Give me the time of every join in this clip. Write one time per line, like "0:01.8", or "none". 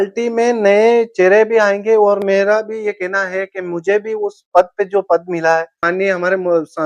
none